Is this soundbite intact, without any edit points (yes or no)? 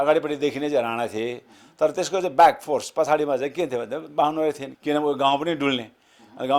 no